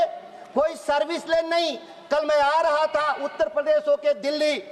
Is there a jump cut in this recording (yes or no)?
no